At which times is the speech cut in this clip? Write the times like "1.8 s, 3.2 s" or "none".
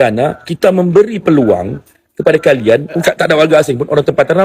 3.0 s